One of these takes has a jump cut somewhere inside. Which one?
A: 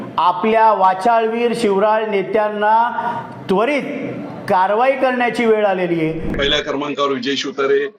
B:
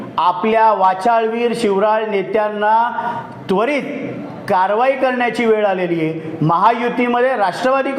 A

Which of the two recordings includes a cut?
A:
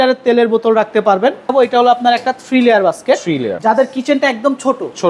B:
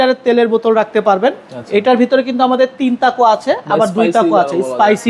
A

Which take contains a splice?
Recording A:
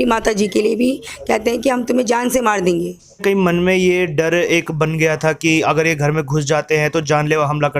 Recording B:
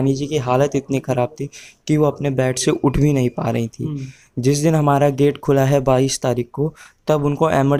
A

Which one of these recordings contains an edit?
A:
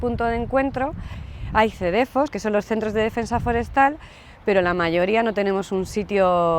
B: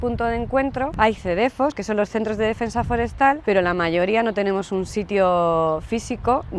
B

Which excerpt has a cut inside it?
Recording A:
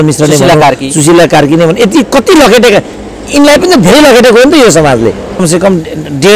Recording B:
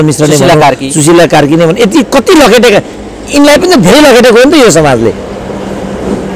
A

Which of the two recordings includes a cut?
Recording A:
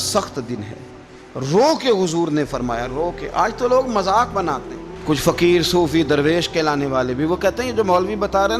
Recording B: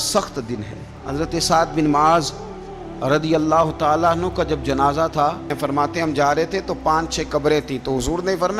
B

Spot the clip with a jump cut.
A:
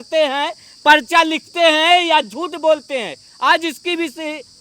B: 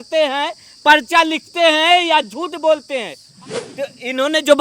B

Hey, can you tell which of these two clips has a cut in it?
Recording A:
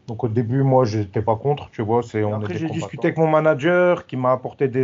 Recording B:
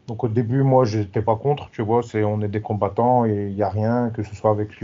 A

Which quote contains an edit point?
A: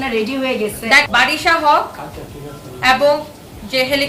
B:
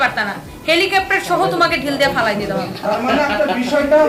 A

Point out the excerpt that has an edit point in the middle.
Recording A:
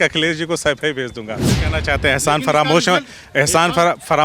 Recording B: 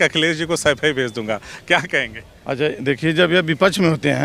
A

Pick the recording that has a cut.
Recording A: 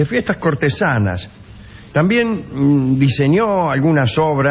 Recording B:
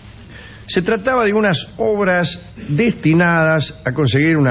B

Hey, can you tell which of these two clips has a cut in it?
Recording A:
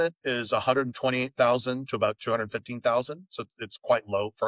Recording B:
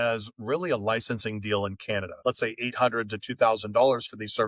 B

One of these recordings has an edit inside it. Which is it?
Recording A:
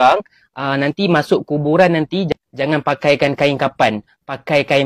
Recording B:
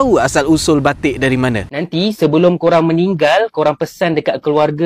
B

